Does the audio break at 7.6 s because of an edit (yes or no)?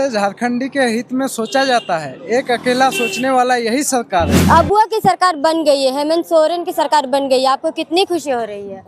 no